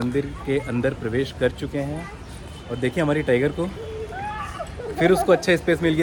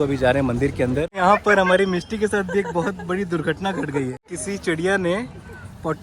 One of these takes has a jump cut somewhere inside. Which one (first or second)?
second